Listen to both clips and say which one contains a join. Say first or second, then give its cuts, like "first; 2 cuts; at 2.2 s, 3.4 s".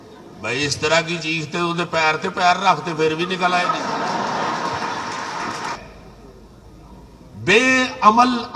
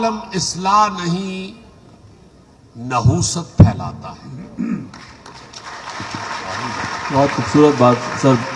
first; 1 cut; at 5.8 s